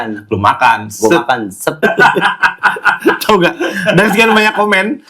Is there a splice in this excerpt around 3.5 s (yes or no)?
no